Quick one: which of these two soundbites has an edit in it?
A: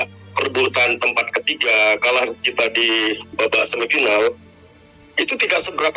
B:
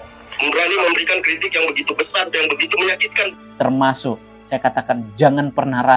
B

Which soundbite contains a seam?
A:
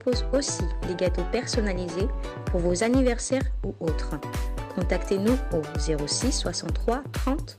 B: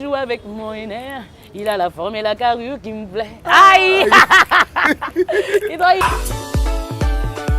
B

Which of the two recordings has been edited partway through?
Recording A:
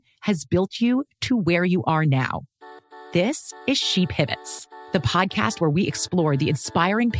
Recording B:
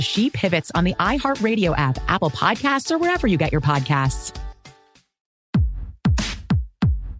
B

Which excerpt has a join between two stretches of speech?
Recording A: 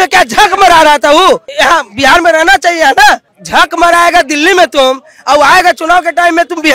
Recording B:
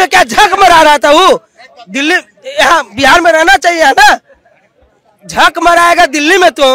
A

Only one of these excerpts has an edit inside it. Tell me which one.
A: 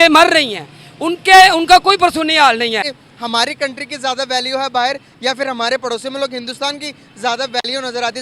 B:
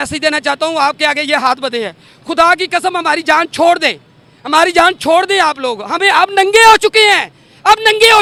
A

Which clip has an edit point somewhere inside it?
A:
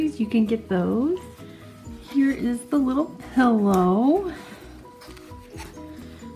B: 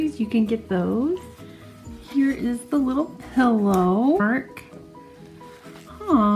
A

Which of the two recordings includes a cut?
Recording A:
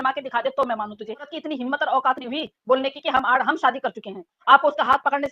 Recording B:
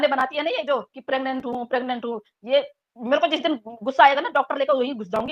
A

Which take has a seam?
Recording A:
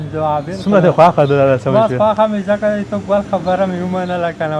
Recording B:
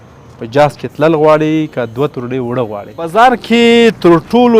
B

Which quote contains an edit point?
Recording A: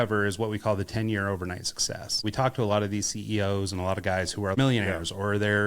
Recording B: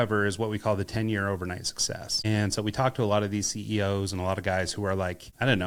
A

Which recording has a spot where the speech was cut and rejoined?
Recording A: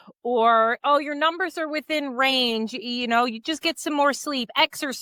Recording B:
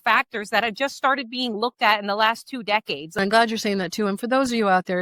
B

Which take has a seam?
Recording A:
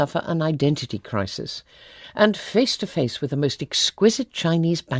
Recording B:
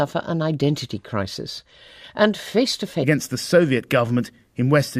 A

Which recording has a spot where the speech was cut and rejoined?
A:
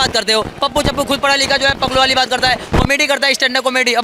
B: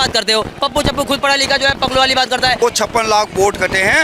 B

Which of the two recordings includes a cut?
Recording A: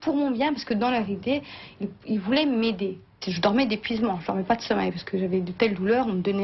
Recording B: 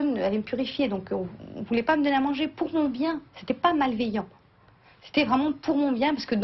A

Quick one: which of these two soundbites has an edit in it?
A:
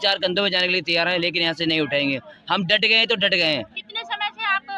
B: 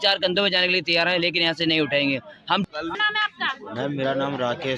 B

